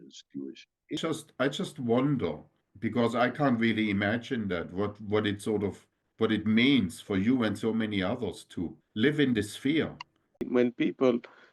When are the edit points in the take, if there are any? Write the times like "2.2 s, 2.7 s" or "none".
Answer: 1.0 s, 10.5 s